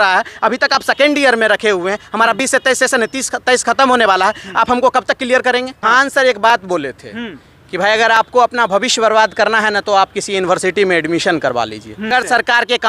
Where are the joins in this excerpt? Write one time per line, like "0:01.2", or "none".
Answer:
0:05.8
0:12.1